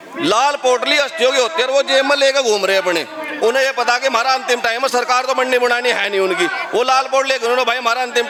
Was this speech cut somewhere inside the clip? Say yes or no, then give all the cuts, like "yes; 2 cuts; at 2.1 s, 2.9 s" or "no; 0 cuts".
no; 0 cuts